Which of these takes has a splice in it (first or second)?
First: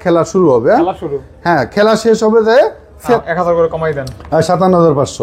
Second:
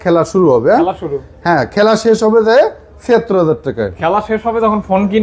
first